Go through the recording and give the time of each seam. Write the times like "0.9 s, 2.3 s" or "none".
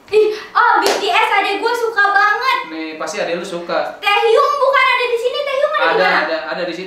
none